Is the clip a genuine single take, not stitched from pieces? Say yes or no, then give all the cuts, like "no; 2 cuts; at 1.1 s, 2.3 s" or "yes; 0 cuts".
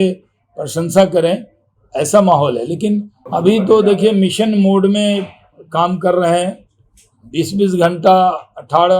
no; 1 cut; at 3.2 s